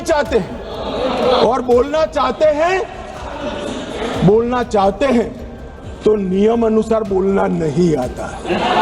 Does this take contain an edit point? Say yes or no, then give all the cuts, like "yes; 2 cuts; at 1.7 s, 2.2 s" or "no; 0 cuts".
no; 0 cuts